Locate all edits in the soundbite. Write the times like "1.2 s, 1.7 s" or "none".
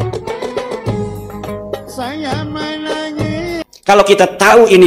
3.6 s